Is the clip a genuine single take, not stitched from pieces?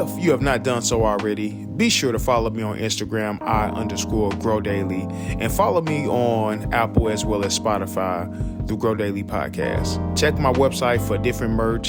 yes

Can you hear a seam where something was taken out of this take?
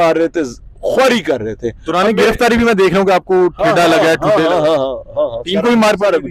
no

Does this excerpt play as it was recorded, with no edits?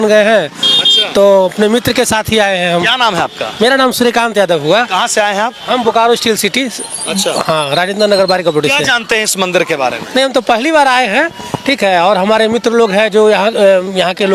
yes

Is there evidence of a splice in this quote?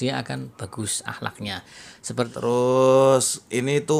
yes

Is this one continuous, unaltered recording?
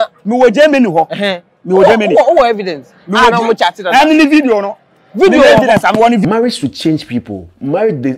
no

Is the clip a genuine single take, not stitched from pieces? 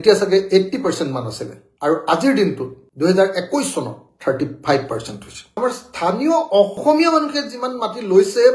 no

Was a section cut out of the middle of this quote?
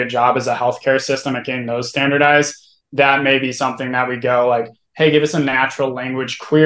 no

